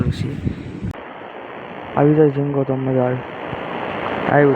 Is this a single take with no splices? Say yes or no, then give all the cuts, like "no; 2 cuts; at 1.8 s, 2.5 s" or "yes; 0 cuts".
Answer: no; 1 cut; at 1.0 s